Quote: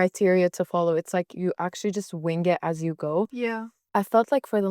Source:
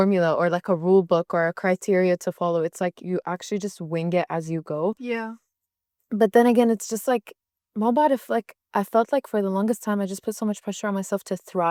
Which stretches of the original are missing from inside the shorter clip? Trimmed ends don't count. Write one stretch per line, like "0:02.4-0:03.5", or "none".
0:05.4-0:08.6